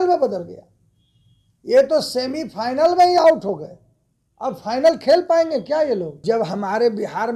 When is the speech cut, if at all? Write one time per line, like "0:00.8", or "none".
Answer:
0:06.2